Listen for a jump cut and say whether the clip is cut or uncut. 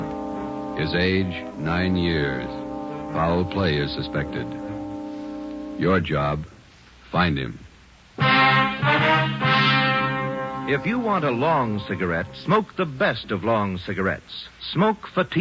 uncut